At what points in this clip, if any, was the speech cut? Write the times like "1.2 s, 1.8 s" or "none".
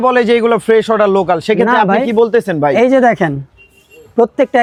none